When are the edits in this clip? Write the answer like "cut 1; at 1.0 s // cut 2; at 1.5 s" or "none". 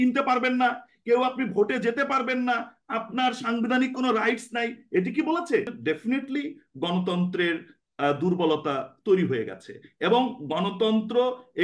cut 1; at 5.8 s